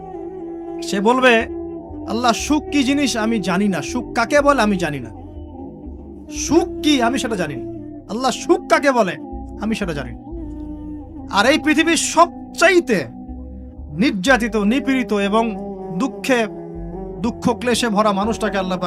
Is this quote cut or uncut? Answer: cut